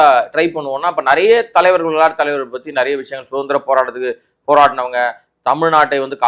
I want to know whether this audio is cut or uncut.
uncut